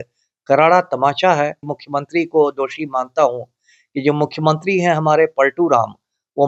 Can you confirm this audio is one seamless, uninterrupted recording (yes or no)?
no